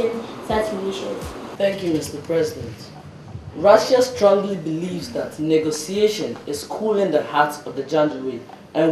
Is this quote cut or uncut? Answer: cut